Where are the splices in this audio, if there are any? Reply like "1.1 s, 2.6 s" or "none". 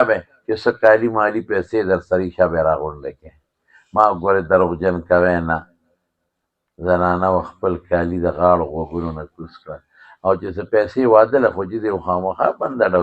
none